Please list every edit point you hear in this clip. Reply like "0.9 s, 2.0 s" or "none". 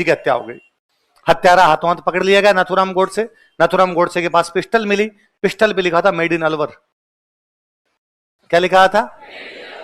none